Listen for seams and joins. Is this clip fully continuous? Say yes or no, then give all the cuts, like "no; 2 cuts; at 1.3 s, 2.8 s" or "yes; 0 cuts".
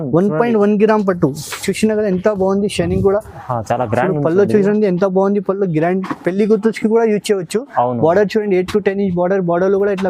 yes; 0 cuts